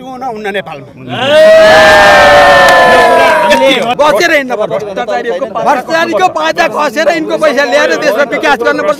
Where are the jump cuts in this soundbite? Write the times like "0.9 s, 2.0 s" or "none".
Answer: 3.9 s